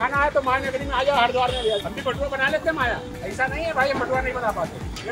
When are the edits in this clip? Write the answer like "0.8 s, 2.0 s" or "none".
1.8 s, 3.1 s